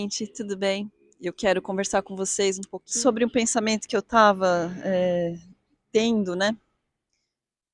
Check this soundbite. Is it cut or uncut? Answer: cut